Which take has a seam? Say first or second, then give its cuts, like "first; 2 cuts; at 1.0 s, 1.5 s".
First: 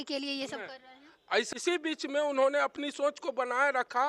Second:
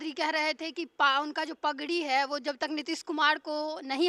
first; 1 cut; at 1.5 s